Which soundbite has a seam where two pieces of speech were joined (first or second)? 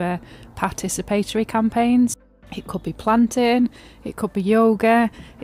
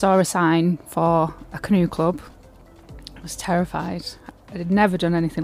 first